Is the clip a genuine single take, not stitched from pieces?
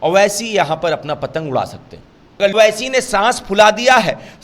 no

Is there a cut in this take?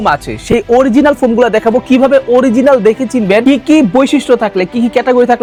no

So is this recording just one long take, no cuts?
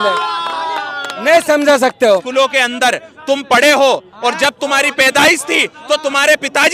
no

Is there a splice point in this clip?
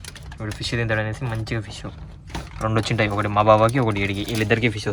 no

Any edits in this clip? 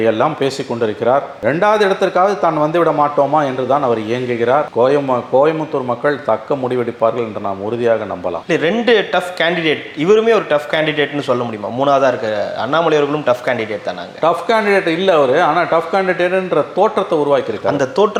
no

